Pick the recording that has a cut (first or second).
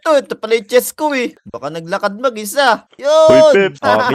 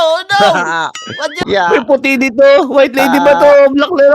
second